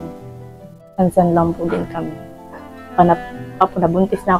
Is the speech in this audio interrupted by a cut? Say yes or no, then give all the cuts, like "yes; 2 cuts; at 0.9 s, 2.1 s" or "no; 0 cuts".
no; 0 cuts